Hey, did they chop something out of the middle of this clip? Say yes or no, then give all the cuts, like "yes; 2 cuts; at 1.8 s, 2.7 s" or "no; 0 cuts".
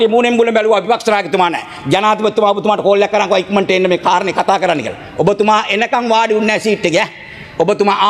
no; 0 cuts